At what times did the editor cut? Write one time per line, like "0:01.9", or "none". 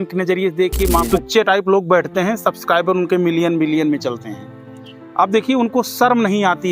0:01.0